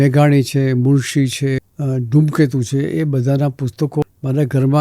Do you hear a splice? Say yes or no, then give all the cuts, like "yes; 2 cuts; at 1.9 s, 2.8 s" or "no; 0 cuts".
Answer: yes; 2 cuts; at 1.7 s, 4.0 s